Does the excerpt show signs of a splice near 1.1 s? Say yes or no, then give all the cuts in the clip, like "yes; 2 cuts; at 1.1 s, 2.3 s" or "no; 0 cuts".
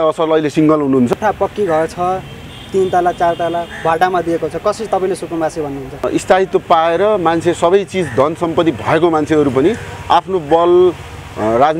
yes; 2 cuts; at 1.1 s, 6.1 s